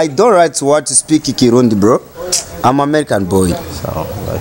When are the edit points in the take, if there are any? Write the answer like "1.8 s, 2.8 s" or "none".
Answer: none